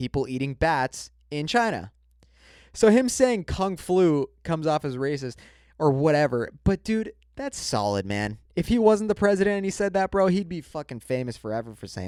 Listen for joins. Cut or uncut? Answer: uncut